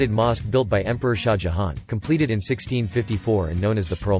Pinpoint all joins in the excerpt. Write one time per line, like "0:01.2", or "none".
none

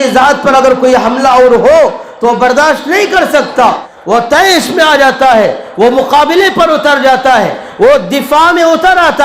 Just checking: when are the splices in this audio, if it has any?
0:03.9

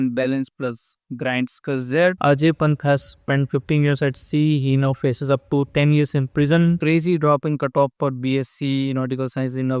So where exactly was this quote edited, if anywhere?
0:02.2
0:06.8

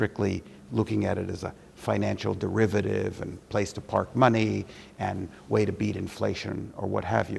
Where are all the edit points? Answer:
none

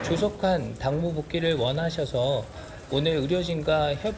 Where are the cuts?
none

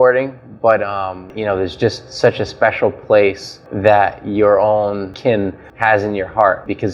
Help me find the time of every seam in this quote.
0:01.3
0:05.6

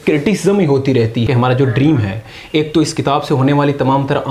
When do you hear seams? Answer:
0:01.2

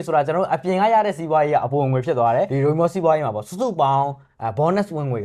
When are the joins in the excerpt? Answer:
0:02.5

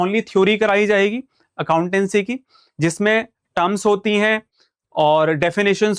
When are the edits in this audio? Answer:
none

